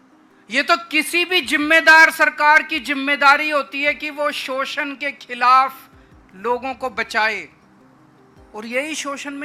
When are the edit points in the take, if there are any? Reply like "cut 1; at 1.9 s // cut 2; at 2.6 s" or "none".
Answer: none